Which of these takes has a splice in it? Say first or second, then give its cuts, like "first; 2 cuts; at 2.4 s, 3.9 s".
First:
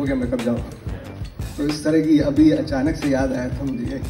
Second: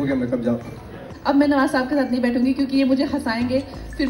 second; 1 cut; at 1.1 s